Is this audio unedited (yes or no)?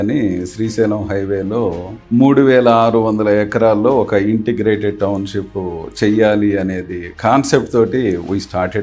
yes